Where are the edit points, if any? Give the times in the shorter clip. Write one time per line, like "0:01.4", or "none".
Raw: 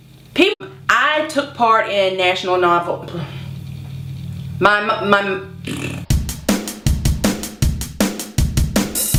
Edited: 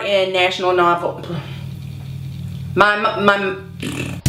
none